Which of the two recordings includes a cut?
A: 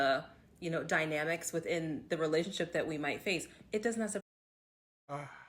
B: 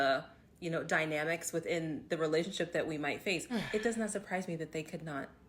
B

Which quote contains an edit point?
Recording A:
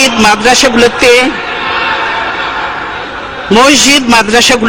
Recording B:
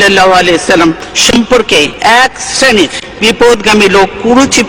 B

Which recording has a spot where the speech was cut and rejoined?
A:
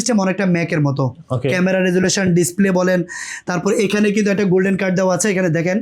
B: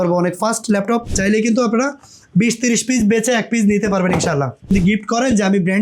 B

